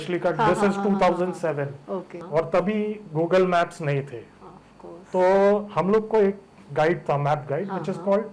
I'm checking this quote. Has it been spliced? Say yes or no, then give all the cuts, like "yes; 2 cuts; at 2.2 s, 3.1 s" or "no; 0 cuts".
yes; 1 cut; at 2.1 s